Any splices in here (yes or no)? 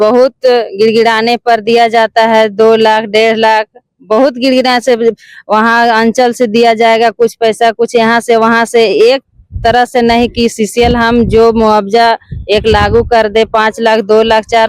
no